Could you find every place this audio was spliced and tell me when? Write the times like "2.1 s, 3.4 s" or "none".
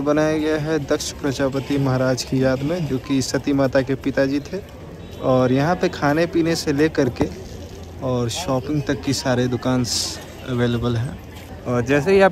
none